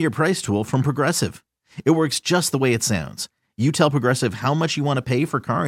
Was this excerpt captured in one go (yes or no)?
yes